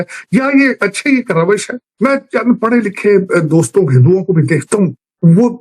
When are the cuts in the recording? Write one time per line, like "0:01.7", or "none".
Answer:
0:01.8